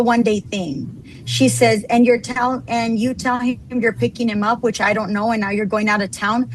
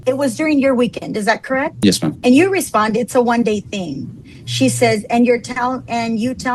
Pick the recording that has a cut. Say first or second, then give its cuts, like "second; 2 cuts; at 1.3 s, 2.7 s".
second; 1 cut; at 2.2 s